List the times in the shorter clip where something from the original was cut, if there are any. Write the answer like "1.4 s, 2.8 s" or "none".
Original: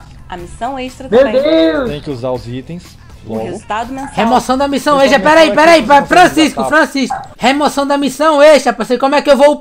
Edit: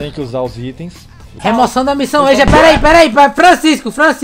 1.3 s